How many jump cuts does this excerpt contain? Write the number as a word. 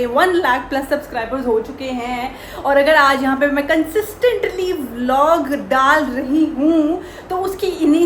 zero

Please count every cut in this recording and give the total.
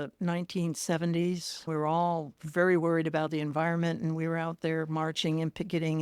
one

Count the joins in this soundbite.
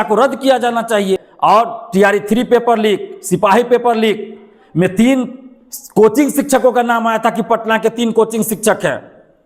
one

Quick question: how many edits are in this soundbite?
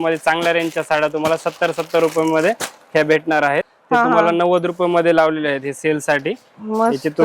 one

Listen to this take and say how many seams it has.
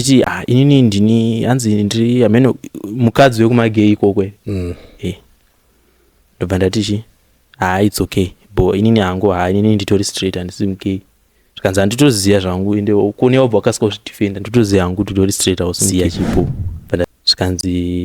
one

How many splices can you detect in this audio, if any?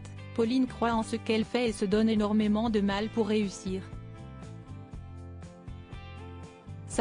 two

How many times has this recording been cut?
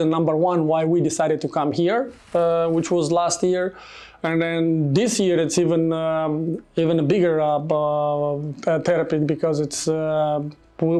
zero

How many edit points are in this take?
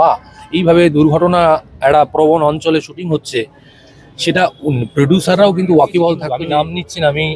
one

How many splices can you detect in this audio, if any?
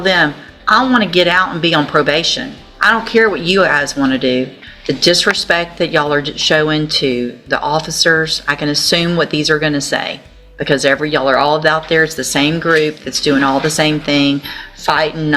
one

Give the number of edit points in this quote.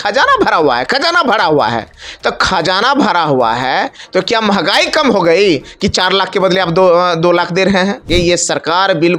one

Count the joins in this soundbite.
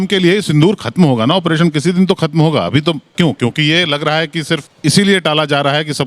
two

